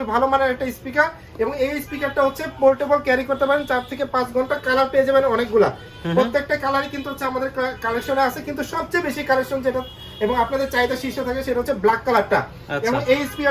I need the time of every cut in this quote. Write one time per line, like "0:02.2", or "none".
none